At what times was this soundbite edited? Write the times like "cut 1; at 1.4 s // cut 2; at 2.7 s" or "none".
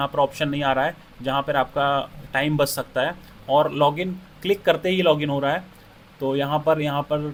none